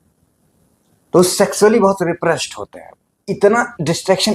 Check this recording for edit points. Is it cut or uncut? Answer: cut